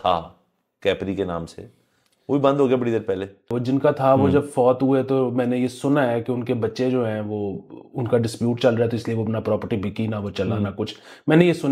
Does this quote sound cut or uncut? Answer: cut